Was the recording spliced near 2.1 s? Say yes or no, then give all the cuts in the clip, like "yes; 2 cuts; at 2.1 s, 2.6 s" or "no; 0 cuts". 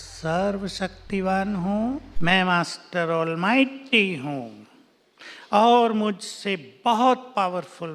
yes; 1 cut; at 2.1 s